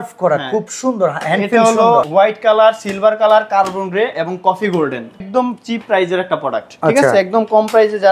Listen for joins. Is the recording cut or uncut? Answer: cut